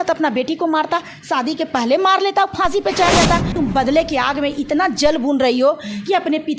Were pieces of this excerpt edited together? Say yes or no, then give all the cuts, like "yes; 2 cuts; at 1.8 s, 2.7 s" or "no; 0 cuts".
yes; 1 cut; at 3.5 s